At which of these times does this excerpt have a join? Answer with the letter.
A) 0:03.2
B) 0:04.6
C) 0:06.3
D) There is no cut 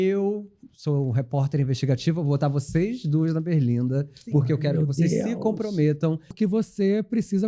C